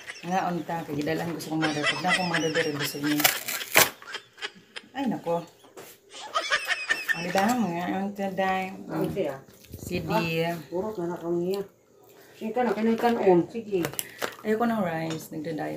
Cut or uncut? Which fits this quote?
uncut